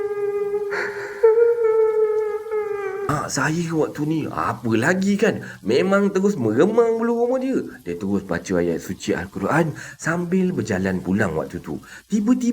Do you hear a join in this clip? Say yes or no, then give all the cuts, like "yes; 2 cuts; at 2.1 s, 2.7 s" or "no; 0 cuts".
yes; 1 cut; at 3.1 s